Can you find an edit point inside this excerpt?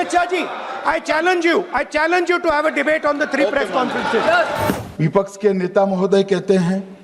yes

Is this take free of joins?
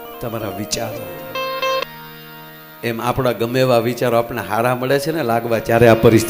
no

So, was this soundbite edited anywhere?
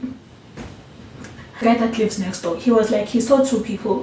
yes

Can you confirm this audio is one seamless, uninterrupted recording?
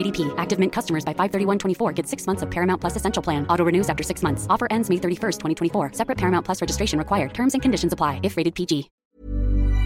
no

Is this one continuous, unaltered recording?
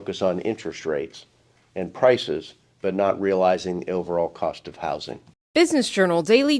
no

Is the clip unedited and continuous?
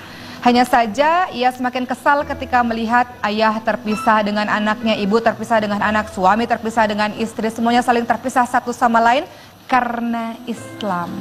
no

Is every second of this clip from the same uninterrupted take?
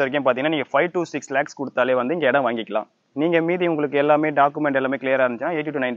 yes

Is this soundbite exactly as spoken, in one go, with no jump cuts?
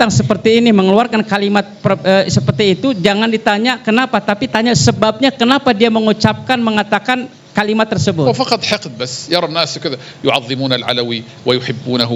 yes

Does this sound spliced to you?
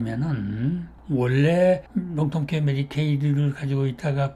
no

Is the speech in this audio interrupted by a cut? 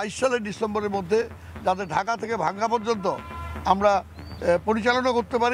no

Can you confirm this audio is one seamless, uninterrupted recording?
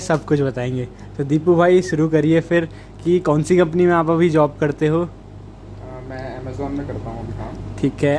yes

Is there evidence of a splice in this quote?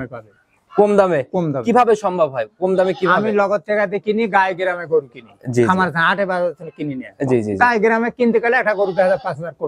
no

